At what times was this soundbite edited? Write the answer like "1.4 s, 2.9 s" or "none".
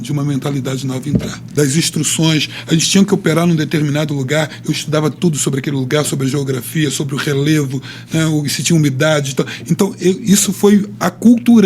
1.5 s